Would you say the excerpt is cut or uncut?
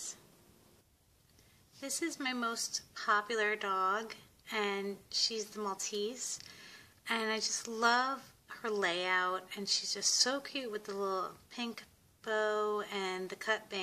cut